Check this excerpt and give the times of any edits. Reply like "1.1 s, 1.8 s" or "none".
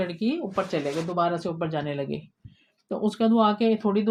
none